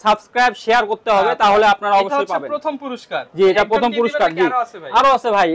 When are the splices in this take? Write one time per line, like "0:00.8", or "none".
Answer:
none